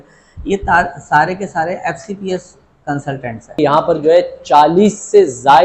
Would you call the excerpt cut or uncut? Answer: cut